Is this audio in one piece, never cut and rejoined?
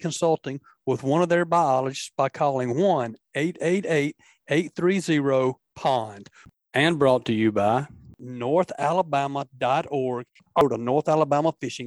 no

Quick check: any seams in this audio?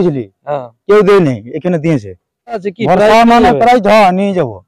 yes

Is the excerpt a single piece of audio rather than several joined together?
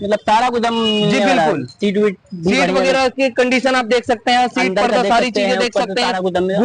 yes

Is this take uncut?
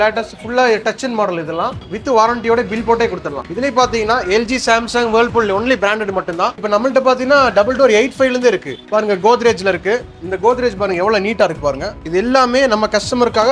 no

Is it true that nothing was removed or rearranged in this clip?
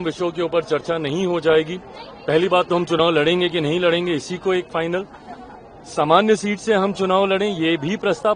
yes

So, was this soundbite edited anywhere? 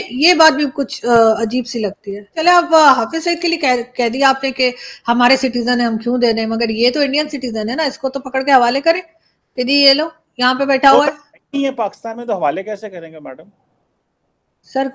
yes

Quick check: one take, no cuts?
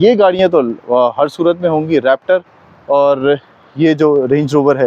yes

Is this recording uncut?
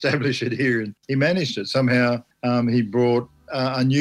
no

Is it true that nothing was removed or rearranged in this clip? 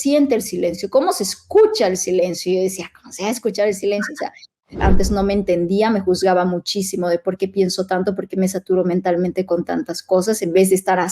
no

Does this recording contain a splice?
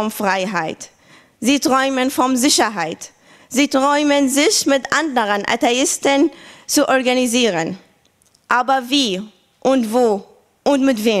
no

